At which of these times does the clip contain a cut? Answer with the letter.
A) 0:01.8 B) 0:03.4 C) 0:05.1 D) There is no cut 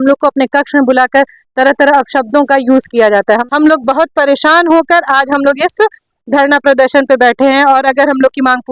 B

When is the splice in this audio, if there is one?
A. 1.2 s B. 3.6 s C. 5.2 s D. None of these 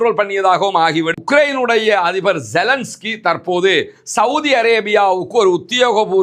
A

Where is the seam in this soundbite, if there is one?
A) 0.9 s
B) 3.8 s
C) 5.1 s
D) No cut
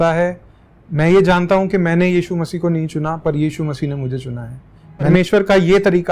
C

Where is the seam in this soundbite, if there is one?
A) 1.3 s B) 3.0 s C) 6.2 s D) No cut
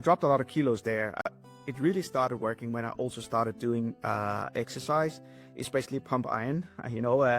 A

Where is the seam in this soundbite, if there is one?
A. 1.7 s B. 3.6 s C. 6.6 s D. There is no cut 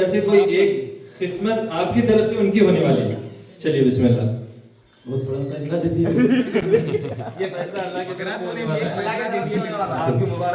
D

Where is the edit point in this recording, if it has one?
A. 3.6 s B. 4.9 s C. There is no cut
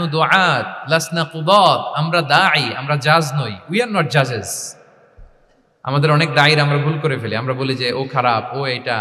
C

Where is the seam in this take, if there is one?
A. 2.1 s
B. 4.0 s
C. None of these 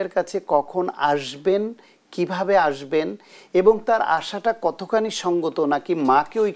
C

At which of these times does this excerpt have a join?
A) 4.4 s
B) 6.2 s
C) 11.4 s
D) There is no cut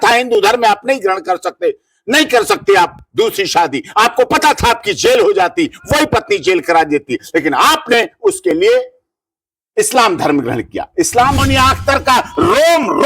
C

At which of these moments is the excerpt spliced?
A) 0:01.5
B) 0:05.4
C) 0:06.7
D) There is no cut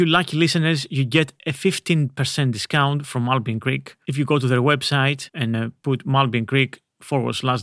B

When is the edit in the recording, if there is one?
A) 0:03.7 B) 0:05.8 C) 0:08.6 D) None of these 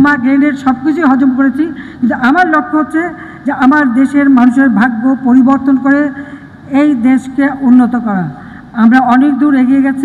D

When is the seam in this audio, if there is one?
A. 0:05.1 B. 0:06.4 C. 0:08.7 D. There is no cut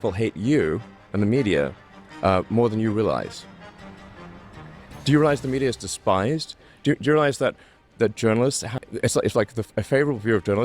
C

